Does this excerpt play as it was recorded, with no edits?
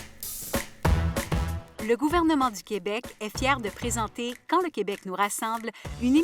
no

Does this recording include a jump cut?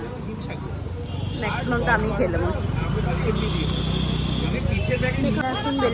no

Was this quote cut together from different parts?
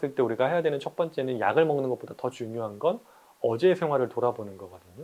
no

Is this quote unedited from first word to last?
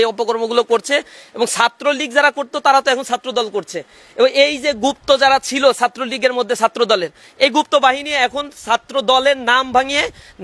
yes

